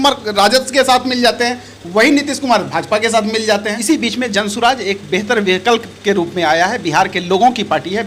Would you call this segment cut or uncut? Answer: cut